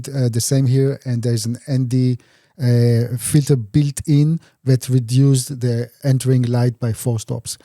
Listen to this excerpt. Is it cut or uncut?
cut